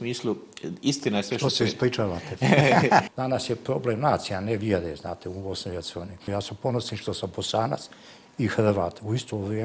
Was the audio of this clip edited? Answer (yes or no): yes